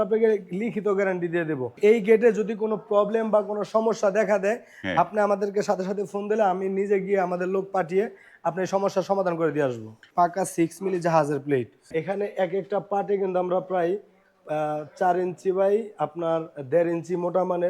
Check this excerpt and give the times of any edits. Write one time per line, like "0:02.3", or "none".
0:01.8
0:10.0
0:11.9